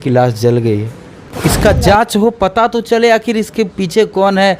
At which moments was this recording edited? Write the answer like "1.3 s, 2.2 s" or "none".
1.2 s